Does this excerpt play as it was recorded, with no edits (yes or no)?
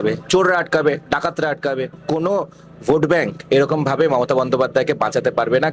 no